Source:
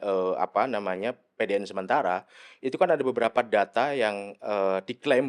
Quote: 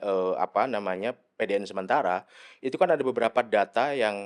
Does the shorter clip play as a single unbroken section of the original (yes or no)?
yes